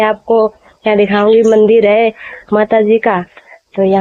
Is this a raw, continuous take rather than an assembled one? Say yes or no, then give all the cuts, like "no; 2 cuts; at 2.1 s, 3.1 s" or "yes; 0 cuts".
yes; 0 cuts